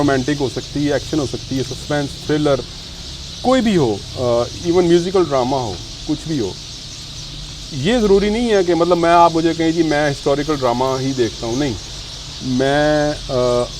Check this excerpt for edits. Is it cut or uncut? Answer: uncut